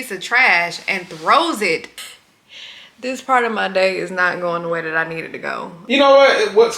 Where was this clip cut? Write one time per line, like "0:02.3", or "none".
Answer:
0:01.9
0:05.7